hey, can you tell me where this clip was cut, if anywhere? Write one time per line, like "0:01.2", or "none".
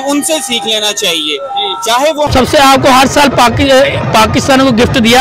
0:02.3